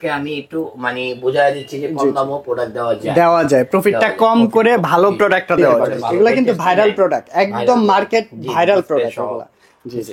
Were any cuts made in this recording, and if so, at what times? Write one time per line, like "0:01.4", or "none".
0:06.0